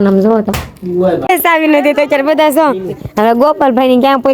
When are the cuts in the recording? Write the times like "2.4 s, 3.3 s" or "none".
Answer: 1.3 s